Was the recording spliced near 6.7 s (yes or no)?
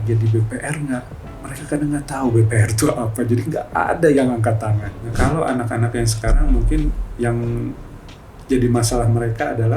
no